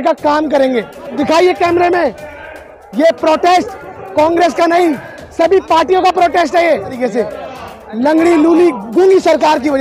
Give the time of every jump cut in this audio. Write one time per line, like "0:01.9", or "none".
0:01.1
0:07.0